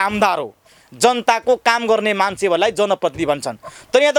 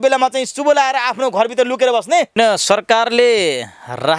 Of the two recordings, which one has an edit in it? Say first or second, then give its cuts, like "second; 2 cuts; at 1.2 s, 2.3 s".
second; 1 cut; at 2.3 s